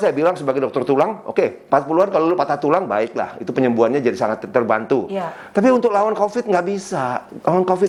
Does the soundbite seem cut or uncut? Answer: uncut